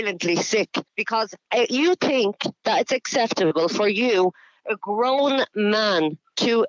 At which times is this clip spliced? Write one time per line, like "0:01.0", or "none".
0:01.4

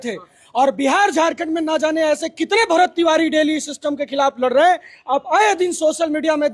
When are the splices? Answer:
none

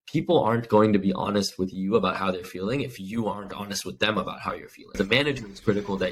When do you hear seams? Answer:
0:05.0

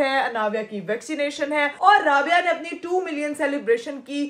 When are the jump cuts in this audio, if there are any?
none

